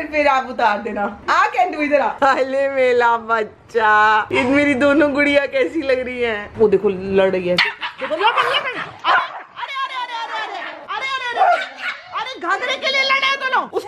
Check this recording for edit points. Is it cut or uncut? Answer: uncut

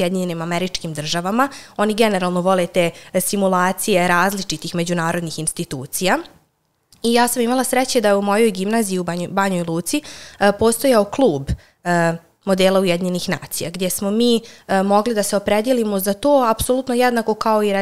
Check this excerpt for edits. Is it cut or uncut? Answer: uncut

